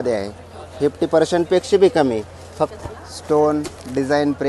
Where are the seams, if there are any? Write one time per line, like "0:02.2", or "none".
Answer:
0:02.7